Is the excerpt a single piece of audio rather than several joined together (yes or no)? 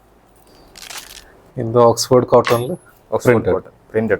no